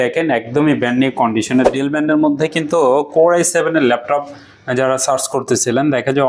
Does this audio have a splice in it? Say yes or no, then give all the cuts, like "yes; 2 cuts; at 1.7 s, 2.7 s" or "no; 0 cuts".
yes; 1 cut; at 1.7 s